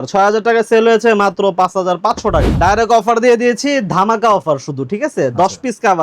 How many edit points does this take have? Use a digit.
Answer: 1